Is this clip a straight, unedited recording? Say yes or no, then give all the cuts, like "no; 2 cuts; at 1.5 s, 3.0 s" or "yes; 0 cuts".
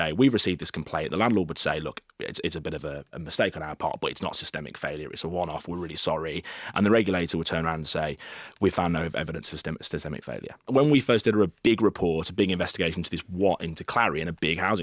no; 2 cuts; at 3.1 s, 10.7 s